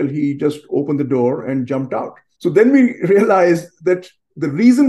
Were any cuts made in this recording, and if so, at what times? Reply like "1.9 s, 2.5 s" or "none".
2.2 s